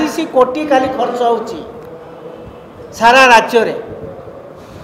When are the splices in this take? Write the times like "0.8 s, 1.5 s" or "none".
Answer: none